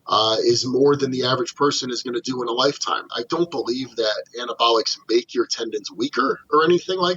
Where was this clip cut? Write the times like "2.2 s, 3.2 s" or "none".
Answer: 3.1 s